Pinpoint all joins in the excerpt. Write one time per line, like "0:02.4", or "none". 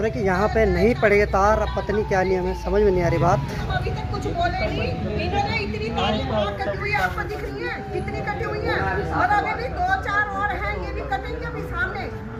none